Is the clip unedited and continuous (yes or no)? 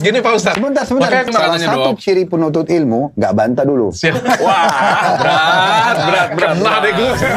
no